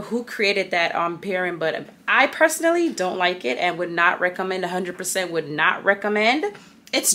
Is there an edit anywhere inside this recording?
no; 0 cuts

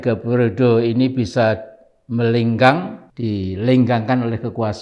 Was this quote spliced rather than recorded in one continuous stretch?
no; 0 cuts

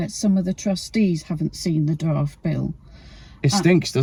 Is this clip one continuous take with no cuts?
yes; 0 cuts

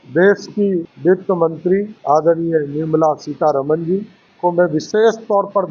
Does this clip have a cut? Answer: yes; 3 cuts; at 0.9 s, 1.9 s, 4.2 s

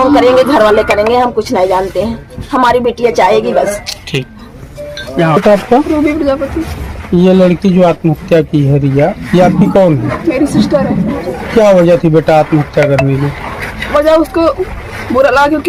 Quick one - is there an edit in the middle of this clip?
no; 0 cuts

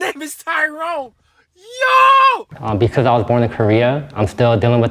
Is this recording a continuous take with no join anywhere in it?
no; 1 cut; at 2.6 s

